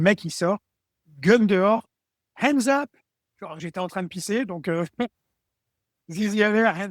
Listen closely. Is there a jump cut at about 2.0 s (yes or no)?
no